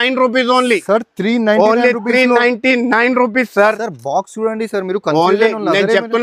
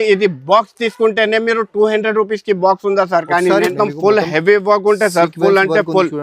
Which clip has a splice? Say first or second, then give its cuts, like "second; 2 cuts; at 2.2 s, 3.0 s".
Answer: second; 1 cut; at 3.7 s